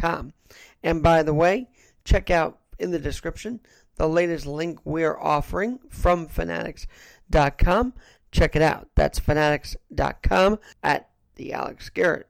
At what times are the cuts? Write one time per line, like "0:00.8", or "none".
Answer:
0:10.7

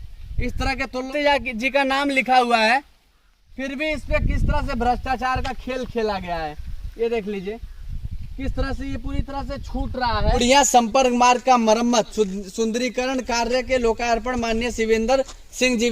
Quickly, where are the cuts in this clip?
0:01.1
0:10.4

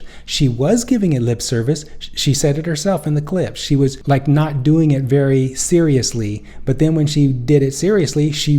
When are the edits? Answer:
0:04.0

